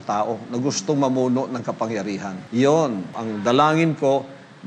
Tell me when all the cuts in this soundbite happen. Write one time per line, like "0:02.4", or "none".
0:02.4
0:03.2